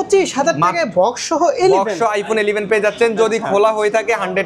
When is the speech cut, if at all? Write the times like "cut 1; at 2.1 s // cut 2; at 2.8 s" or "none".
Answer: none